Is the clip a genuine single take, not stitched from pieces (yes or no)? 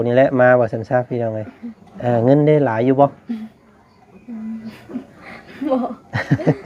yes